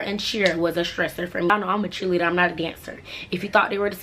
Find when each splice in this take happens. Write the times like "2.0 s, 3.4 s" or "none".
1.5 s